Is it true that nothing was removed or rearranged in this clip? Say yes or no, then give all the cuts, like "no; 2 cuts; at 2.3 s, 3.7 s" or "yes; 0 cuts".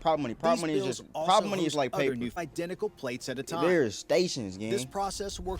no; 1 cut; at 2.3 s